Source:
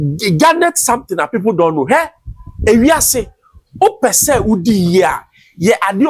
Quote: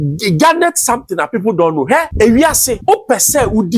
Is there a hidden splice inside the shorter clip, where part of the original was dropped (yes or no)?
yes